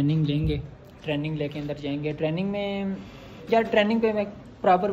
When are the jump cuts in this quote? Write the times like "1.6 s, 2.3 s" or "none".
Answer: none